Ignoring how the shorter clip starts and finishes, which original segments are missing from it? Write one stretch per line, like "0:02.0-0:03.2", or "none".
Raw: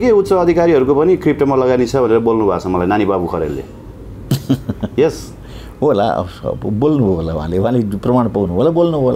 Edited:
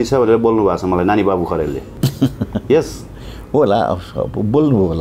0:03.7-0:04.1